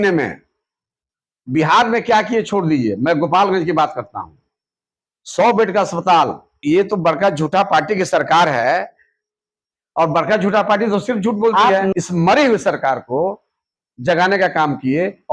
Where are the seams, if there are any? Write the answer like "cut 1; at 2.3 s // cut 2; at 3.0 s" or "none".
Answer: cut 1; at 6.5 s // cut 2; at 11.9 s